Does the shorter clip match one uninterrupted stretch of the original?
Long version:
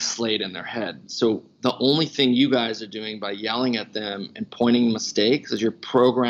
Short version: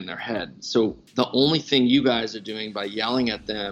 yes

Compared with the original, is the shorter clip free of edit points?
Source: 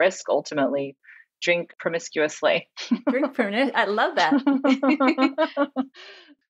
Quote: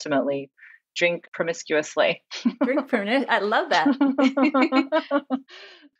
yes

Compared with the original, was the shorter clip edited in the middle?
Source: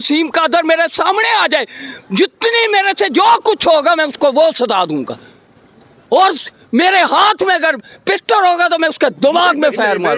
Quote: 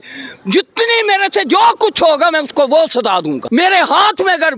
yes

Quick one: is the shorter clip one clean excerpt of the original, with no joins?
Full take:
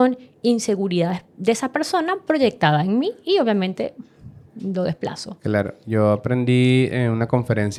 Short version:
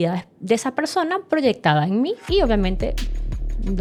yes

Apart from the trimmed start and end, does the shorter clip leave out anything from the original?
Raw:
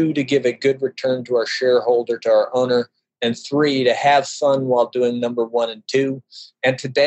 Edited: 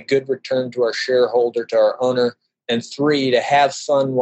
no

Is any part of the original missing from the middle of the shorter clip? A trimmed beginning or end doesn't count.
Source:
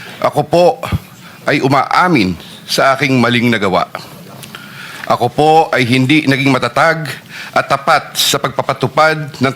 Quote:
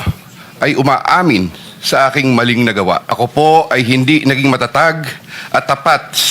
yes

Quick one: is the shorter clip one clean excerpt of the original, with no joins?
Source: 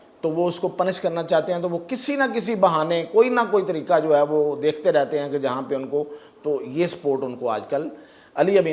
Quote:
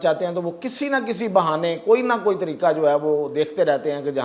yes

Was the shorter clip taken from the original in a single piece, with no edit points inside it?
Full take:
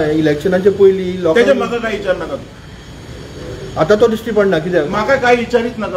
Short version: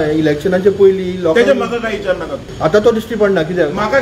no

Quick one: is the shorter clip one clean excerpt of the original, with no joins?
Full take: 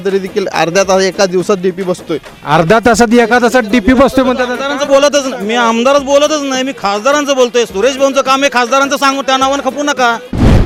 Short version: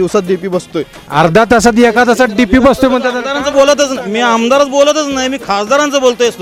yes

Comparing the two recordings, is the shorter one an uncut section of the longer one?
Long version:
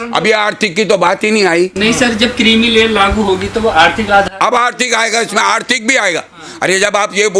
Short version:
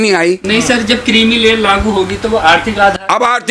yes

